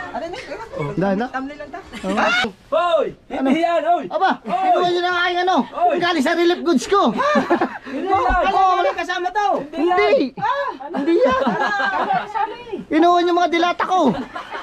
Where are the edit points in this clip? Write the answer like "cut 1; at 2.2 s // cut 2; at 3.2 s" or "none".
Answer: cut 1; at 2.4 s